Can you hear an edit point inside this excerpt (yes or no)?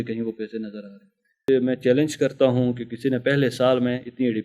yes